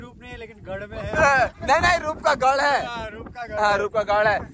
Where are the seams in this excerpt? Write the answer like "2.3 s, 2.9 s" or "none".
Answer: none